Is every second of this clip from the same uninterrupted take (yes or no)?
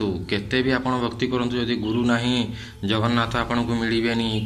yes